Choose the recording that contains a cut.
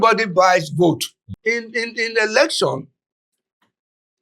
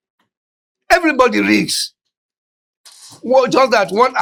first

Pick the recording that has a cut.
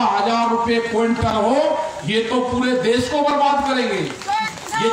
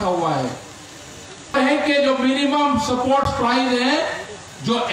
second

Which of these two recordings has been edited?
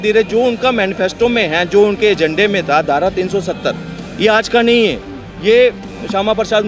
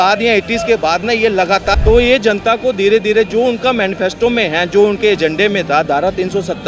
second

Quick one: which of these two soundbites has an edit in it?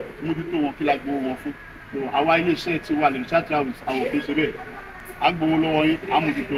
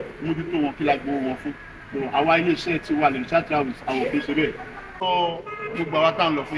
second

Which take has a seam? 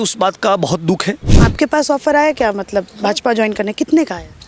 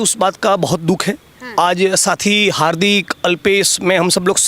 first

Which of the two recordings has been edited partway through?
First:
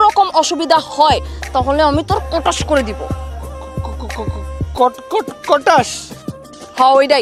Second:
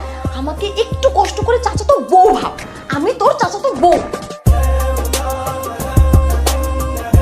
second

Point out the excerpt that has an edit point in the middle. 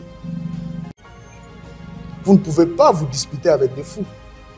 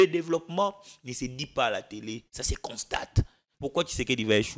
second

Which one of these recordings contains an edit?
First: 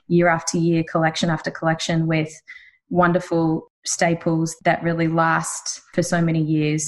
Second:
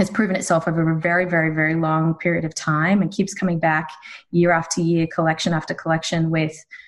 first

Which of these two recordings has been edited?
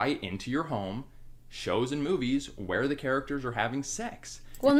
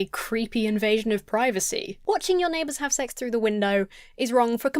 second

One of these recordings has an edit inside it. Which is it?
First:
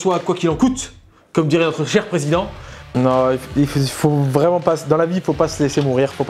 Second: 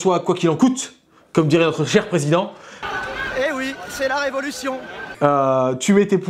first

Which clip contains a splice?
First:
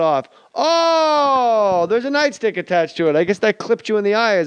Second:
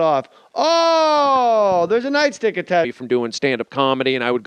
first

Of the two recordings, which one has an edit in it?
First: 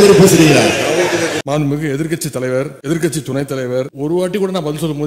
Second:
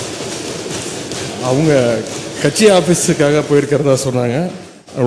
first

